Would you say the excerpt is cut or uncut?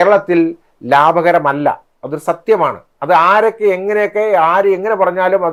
uncut